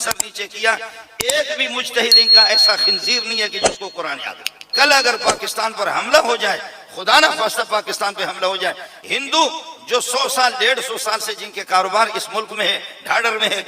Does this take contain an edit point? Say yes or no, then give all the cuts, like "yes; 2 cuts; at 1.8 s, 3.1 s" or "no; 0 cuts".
yes; 1 cut; at 4.6 s